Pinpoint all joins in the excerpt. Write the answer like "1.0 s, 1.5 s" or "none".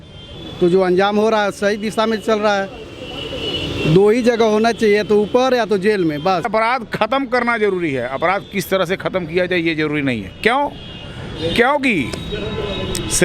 6.5 s